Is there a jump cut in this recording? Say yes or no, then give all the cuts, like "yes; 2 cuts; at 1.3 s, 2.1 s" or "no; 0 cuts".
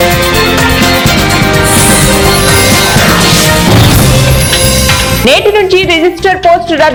no; 0 cuts